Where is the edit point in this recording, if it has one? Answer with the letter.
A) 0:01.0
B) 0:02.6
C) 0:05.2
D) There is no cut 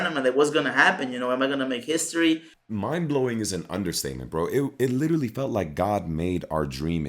B